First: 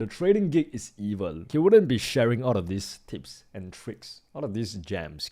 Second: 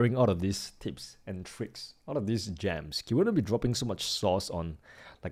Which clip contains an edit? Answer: first; 1 cut; at 1.4 s

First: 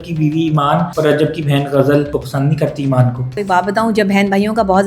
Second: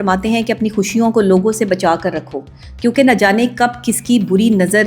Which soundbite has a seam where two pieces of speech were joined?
first; 3 cuts; at 0.9 s, 2.2 s, 3.3 s

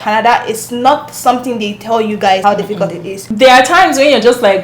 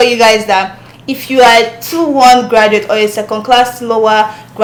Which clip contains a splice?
first; 1 cut; at 2.9 s

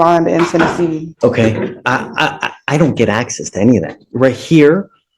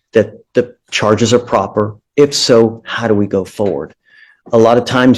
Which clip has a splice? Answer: first; 1 cut; at 1.1 s

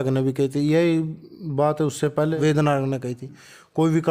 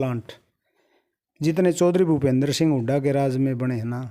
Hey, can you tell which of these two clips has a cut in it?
first; 1 cut; at 2.3 s

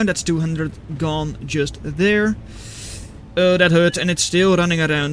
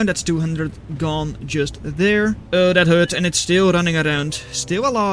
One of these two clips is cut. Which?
second; 1 cut; at 2.4 s

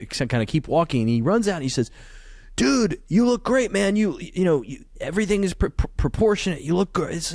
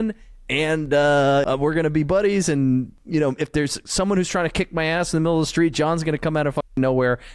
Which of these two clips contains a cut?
second; 2 cuts; at 1.5 s, 3.0 s

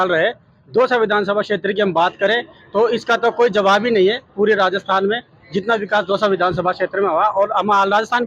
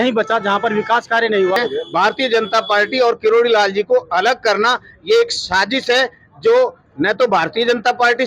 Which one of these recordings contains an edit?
second; 1 cut; at 1.6 s

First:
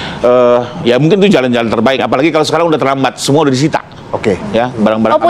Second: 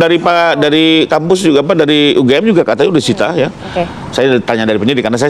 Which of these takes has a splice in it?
first; 1 cut; at 2.0 s

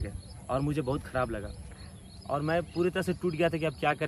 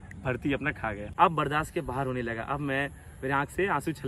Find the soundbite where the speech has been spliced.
second; 1 cut; at 1.1 s

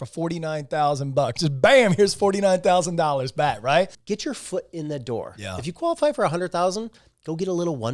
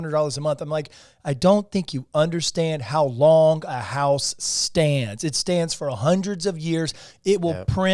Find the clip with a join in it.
first; 1 cut; at 4.0 s

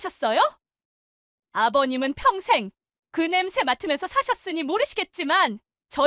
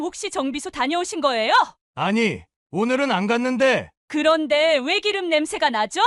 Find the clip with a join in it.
second; 1 cut; at 1.8 s

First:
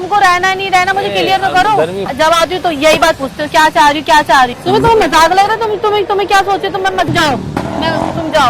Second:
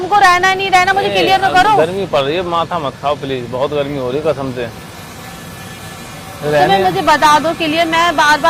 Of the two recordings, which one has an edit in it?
first; 3 cuts; at 2.1 s, 4.6 s, 7.1 s

